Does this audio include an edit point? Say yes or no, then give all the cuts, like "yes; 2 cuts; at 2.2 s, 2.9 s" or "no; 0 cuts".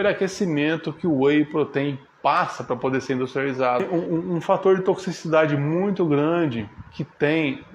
yes; 1 cut; at 3.9 s